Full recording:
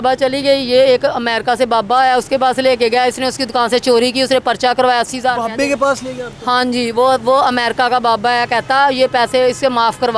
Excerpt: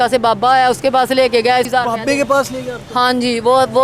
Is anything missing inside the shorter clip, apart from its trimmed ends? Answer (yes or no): yes